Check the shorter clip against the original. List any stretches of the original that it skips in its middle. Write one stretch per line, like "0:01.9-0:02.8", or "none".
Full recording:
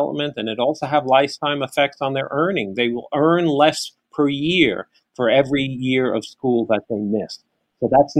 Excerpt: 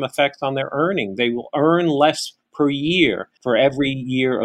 0:04.9-0:05.0